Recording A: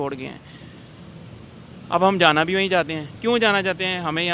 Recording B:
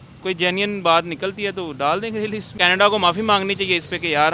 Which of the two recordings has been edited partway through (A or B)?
B